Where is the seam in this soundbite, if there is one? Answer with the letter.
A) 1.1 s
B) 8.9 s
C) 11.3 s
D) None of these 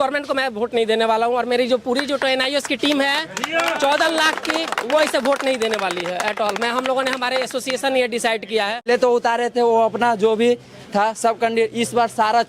B